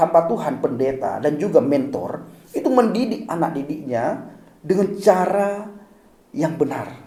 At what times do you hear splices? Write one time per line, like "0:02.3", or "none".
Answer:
none